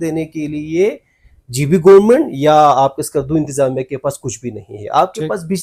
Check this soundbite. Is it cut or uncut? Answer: uncut